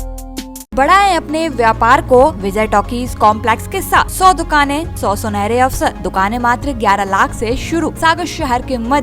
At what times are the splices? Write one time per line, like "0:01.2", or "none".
0:00.7
0:02.4
0:04.1
0:04.9
0:06.0
0:07.9

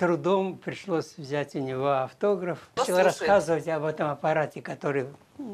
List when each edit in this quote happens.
0:02.8

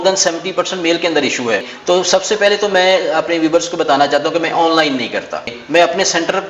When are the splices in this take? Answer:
0:01.7
0:05.5

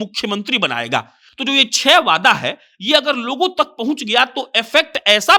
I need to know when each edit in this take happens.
none

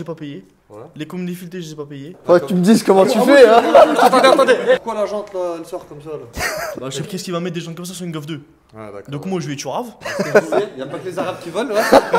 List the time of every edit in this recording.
0:02.1
0:04.8
0:07.1
0:10.0

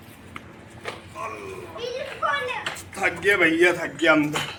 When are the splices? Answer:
none

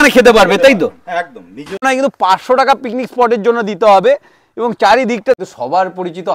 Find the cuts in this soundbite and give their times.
0:01.8
0:05.4

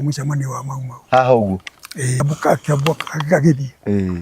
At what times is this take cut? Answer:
0:02.2

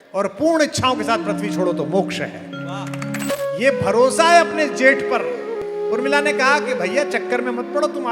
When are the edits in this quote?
0:03.3

